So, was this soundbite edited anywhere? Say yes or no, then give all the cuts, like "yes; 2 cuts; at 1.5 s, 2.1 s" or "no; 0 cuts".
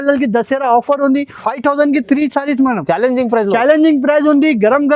yes; 1 cut; at 1.4 s